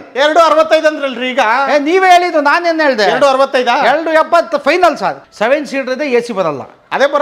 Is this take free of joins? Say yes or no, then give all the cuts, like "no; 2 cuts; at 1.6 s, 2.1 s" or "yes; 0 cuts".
no; 1 cut; at 5.2 s